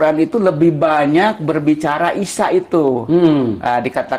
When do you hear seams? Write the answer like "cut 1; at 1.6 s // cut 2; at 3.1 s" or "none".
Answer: none